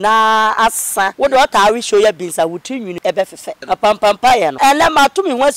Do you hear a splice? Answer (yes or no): yes